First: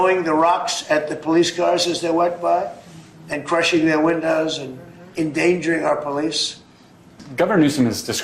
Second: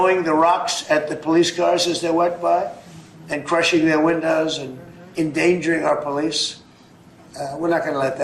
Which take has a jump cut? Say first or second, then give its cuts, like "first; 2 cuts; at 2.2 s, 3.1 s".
first; 1 cut; at 7.2 s